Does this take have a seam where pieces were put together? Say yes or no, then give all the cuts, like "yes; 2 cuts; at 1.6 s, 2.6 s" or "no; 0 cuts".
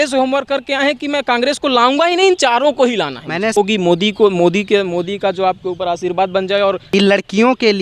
yes; 2 cuts; at 3.5 s, 6.8 s